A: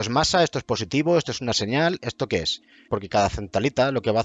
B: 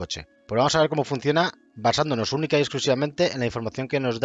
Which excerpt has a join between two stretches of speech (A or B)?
A